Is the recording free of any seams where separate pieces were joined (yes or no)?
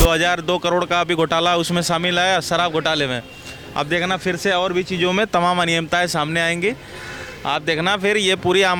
yes